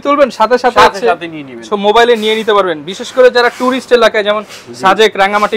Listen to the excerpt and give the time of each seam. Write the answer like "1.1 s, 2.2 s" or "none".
none